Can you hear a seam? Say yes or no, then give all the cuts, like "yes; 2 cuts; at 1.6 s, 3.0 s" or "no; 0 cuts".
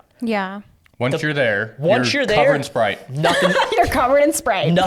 no; 0 cuts